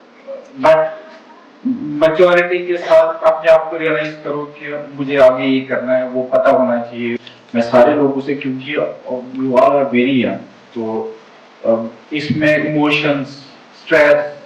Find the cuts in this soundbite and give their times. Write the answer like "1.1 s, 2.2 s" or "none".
7.3 s